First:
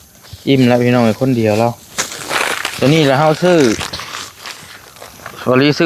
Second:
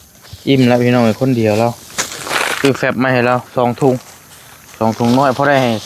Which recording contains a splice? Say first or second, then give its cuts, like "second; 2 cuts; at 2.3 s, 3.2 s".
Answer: second; 1 cut; at 2.5 s